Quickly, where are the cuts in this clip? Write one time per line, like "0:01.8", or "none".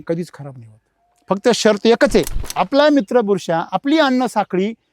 0:02.4